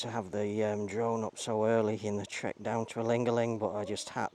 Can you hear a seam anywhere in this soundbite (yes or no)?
no